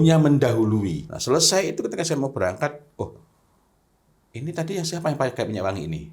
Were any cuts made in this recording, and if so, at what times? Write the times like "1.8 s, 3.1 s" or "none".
1.1 s